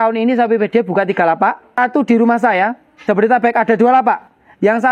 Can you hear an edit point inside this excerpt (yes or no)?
yes